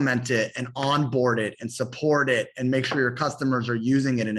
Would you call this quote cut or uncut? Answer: uncut